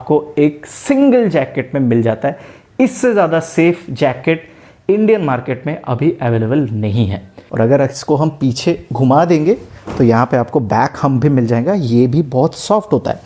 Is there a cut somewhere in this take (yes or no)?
no